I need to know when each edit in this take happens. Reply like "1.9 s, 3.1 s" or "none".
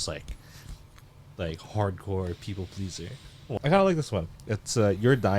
3.4 s